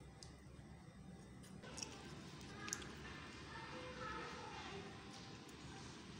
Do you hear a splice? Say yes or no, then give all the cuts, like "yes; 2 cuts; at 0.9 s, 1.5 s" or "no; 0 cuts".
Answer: yes; 1 cut; at 1.9 s